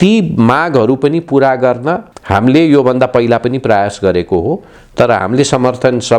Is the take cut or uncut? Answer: cut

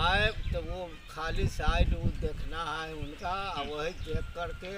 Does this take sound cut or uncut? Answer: uncut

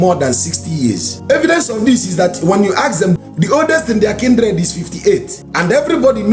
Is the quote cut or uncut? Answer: cut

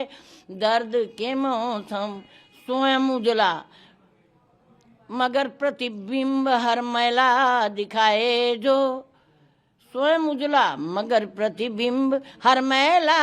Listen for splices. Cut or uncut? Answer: uncut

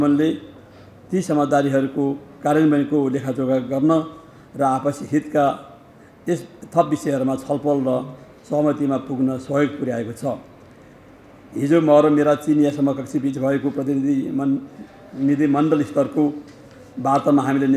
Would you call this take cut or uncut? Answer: uncut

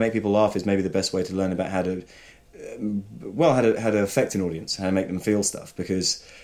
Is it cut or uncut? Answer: uncut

